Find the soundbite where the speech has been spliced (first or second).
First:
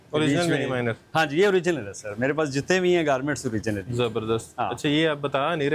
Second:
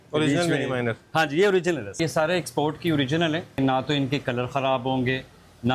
second